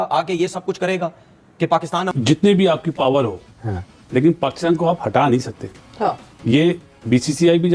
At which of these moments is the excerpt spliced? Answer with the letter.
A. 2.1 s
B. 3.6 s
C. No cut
A